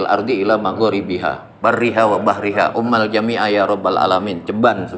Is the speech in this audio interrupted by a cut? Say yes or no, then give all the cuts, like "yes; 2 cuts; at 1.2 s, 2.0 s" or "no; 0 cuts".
no; 0 cuts